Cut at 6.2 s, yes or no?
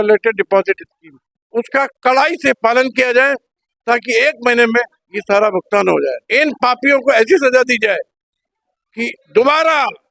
yes